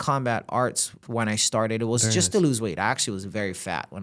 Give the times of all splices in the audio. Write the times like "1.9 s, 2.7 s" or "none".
1.0 s